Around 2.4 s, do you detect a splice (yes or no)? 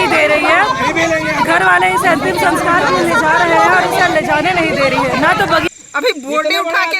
no